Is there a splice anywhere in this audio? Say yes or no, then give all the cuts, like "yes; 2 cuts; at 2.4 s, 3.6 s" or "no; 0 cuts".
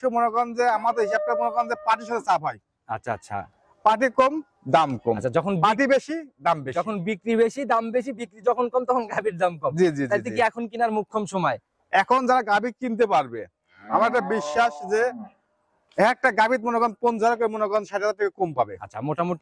no; 0 cuts